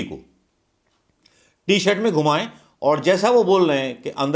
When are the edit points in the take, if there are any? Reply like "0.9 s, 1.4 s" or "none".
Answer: none